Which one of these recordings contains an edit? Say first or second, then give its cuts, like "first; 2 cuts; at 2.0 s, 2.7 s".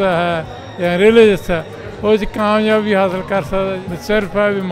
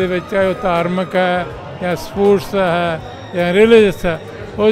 first; 1 cut; at 3.7 s